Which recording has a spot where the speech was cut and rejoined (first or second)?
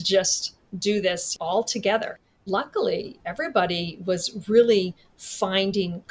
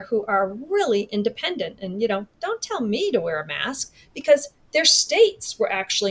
first